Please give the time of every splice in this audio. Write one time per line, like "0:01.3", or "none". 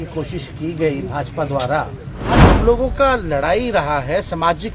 0:02.5